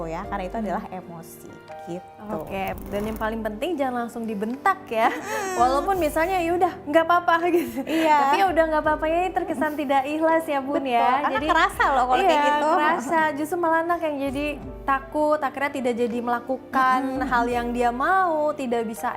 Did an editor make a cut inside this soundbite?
yes; 1 cut; at 2.8 s

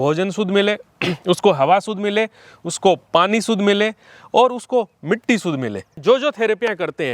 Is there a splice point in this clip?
yes; 1 cut; at 6.0 s

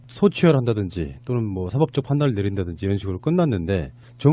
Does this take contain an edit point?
yes; 1 cut; at 3.0 s

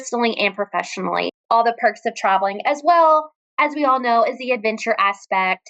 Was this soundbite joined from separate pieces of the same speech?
yes; 1 cut; at 1.3 s

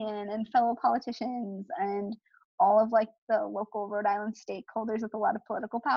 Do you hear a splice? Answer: no; 0 cuts

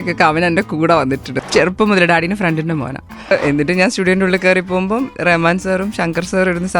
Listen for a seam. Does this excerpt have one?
yes; 2 cuts; at 1.3 s, 3.3 s

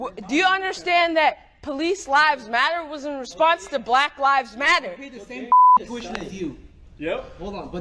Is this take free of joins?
yes; 0 cuts

